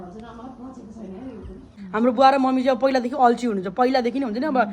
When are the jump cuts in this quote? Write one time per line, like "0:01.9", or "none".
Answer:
0:01.8